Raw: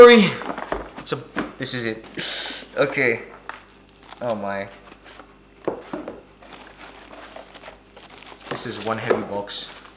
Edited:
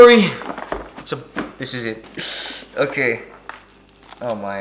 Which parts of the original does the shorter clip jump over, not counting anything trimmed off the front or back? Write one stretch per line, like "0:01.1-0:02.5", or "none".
none